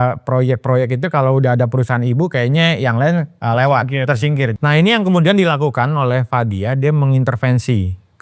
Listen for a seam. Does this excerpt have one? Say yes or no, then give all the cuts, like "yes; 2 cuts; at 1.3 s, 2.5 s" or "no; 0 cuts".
yes; 2 cuts; at 3.3 s, 4.5 s